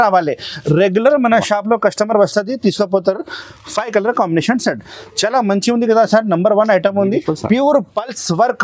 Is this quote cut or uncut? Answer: uncut